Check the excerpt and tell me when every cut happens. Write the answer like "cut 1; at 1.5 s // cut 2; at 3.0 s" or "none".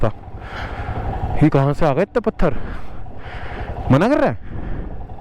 none